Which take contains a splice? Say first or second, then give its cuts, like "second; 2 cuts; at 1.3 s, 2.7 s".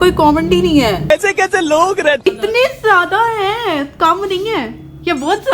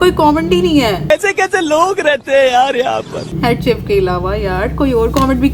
first; 1 cut; at 2.2 s